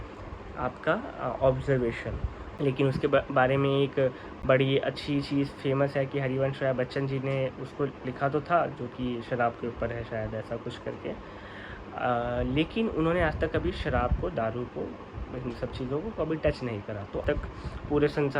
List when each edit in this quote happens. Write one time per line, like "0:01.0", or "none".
0:02.4
0:17.2

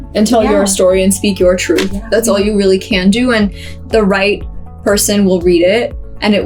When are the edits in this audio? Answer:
none

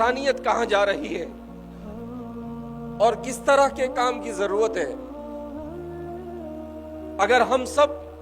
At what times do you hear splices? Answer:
0:01.3
0:02.7
0:05.0
0:07.2

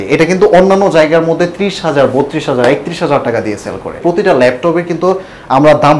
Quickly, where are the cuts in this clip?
0:04.0

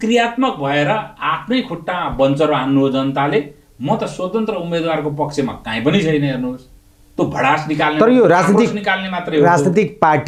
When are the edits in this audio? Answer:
none

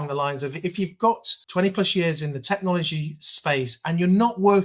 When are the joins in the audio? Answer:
0:01.3

